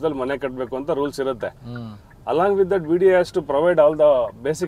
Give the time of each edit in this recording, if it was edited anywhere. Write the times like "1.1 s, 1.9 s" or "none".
none